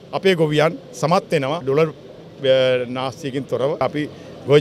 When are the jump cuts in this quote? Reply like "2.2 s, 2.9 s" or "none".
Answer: 1.6 s, 3.8 s